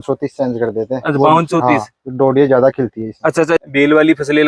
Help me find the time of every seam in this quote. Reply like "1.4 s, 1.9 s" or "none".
3.6 s